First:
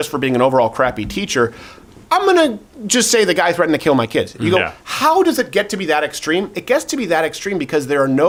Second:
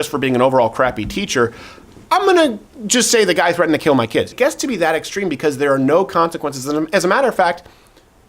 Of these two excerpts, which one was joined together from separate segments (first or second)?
second